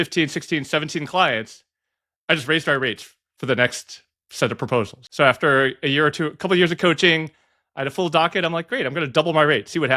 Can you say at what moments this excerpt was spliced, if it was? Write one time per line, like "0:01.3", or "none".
0:05.0

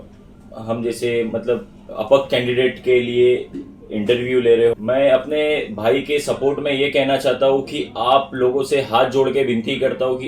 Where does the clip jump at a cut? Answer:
0:04.8

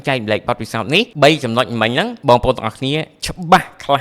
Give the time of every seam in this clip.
0:01.1
0:02.1

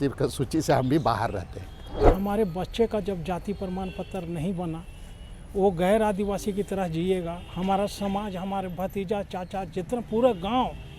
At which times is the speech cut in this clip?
0:02.1

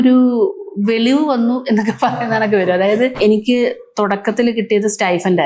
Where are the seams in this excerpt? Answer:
0:03.1

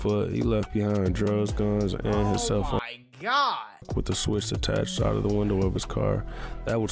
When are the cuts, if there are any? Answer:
0:03.9

